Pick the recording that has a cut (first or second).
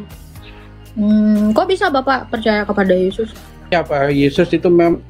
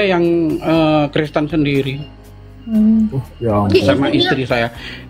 first